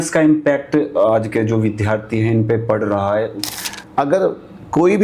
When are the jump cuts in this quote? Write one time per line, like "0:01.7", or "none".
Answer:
0:03.4